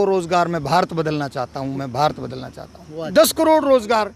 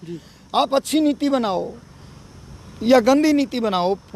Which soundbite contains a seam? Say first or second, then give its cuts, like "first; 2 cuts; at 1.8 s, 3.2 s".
first; 1 cut; at 3.1 s